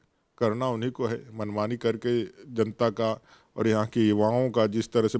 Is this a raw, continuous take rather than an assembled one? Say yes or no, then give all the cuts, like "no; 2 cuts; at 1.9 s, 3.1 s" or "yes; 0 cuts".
yes; 0 cuts